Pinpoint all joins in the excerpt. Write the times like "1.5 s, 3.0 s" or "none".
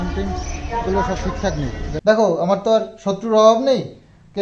1.9 s